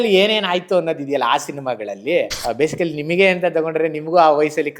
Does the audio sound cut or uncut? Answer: cut